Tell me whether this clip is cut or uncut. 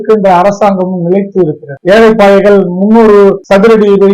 cut